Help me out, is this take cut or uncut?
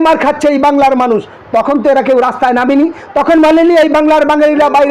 uncut